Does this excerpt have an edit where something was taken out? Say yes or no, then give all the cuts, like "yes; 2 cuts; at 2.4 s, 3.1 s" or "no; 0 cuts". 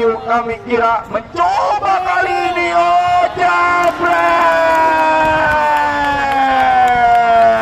no; 0 cuts